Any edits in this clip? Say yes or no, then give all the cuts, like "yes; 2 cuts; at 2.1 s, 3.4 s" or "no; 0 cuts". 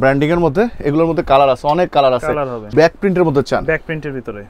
yes; 1 cut; at 2.5 s